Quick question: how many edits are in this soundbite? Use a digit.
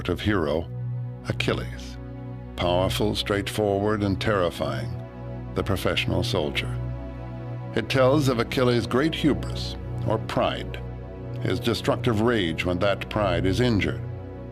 1